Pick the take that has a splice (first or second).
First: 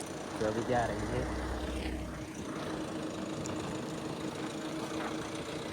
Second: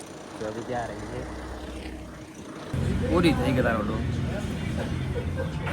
second